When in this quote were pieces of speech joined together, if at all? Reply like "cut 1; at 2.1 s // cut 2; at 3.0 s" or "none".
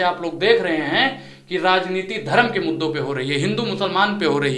none